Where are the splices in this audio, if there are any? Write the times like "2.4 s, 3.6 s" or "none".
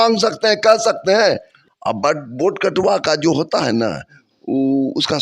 1.5 s